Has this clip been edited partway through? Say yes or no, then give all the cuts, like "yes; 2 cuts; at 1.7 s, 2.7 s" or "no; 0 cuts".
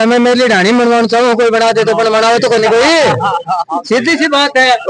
no; 0 cuts